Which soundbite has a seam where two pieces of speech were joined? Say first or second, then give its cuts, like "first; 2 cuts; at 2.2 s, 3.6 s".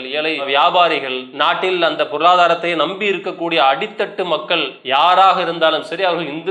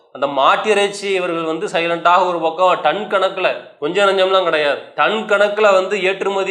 second; 2 cuts; at 3.7 s, 4.9 s